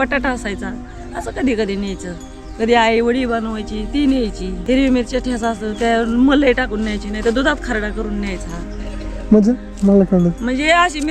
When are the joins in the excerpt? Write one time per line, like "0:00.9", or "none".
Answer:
0:04.5